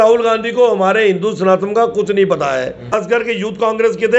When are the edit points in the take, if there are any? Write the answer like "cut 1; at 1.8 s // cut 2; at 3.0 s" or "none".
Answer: cut 1; at 3.0 s